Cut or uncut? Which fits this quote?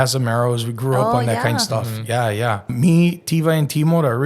cut